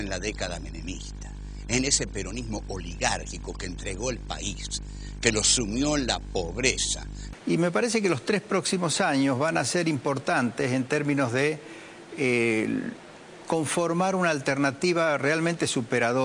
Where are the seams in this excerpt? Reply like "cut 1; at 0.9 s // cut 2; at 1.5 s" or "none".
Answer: cut 1; at 7.3 s